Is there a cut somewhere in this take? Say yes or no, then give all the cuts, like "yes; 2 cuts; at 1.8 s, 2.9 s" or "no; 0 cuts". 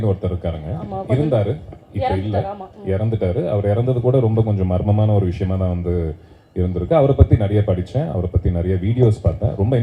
no; 0 cuts